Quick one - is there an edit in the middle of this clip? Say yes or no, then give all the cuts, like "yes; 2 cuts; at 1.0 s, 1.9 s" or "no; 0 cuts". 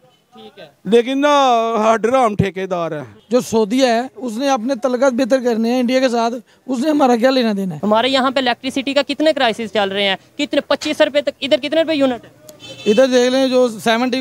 yes; 2 cuts; at 3.1 s, 7.7 s